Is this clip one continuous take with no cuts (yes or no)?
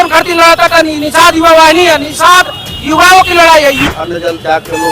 no